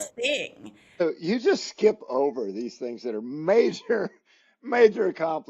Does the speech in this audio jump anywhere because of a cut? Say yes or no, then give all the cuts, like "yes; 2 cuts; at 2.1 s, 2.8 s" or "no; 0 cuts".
yes; 1 cut; at 1.0 s